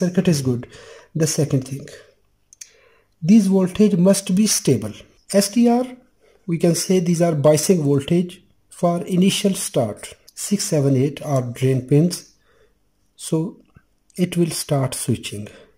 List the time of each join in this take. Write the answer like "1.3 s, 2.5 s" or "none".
5.1 s